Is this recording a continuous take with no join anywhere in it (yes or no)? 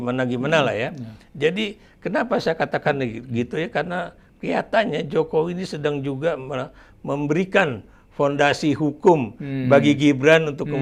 yes